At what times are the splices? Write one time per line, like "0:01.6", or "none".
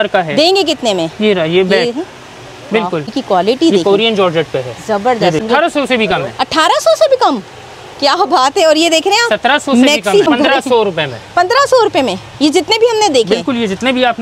0:03.1
0:05.4
0:10.3